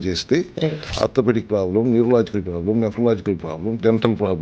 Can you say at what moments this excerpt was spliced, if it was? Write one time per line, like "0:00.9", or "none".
none

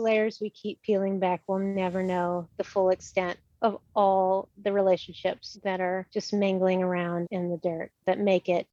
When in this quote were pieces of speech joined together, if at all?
none

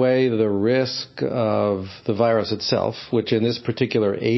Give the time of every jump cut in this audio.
none

